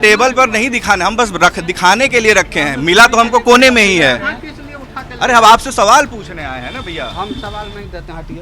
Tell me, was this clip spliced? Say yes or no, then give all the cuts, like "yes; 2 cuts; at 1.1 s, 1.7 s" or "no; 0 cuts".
no; 0 cuts